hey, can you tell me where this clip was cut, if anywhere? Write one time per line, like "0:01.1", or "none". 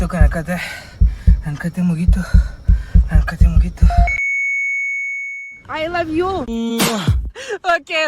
0:04.2